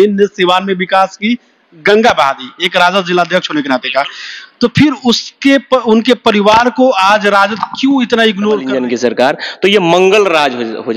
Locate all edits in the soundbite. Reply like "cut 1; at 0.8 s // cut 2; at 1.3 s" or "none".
cut 1; at 8.7 s